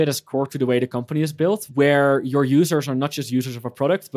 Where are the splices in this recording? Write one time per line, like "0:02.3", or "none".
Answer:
0:01.7